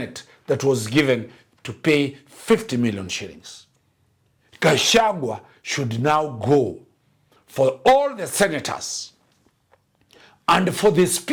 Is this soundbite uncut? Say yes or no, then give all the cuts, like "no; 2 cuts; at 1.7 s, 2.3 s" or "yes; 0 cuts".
yes; 0 cuts